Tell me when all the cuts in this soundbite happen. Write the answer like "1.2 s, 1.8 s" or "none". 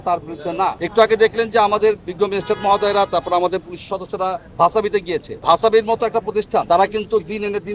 0.8 s, 5.3 s, 6.6 s